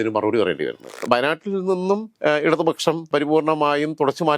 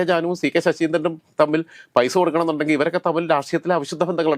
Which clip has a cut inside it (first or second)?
first